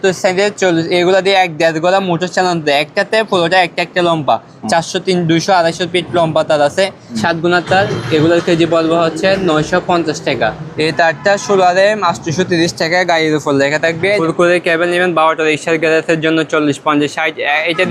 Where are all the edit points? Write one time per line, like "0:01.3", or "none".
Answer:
0:07.0
0:10.6
0:14.2